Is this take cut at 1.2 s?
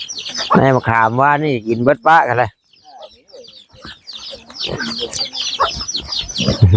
no; 0 cuts

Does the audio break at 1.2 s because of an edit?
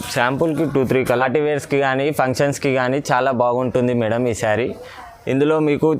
yes; 1 cut; at 1.2 s

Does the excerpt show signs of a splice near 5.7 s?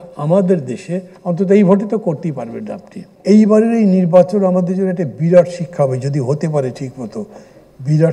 no; 1 cut; at 3.0 s

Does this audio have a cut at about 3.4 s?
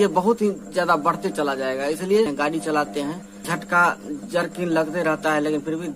yes; 2 cuts; at 2.3 s, 3.4 s

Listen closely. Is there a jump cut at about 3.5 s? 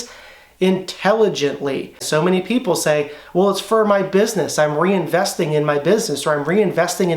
no; 1 cut; at 2.0 s

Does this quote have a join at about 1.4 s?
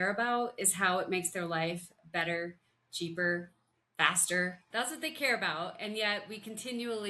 no; 1 cut; at 4.6 s

